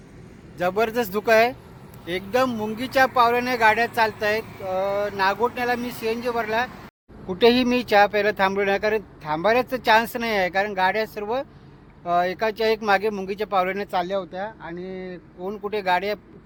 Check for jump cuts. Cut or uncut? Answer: uncut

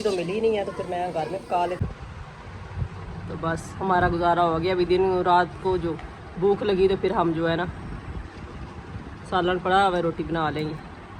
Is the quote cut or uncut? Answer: cut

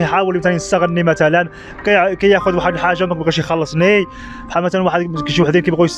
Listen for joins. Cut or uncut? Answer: uncut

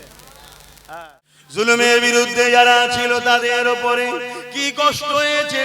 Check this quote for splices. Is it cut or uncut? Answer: cut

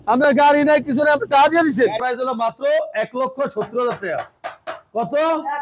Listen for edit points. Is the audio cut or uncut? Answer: cut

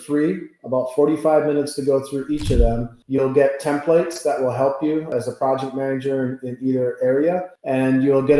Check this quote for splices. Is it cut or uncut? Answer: cut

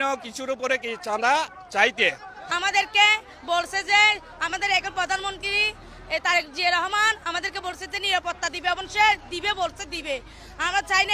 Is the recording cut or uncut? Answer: cut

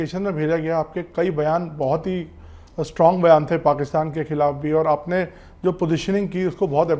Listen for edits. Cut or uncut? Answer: uncut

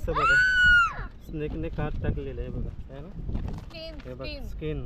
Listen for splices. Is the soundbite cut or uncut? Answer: uncut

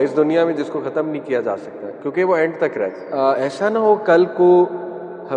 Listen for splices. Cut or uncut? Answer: cut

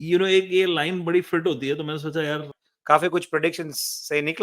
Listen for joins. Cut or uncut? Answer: cut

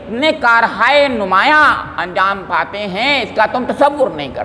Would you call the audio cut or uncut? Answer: uncut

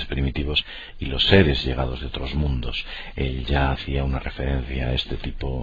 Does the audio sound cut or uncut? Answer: uncut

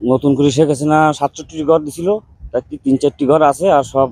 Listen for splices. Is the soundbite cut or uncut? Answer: uncut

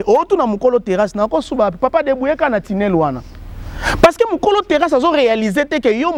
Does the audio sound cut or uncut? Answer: uncut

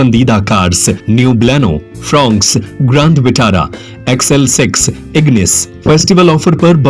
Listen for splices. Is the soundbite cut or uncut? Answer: cut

